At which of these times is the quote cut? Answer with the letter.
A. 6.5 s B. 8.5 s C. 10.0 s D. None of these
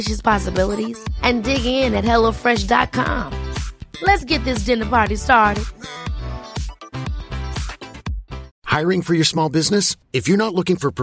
B